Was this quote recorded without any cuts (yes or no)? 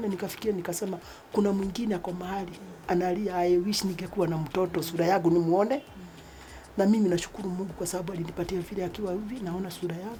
yes